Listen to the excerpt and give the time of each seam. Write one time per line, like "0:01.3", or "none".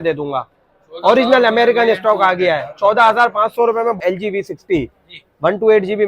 0:04.0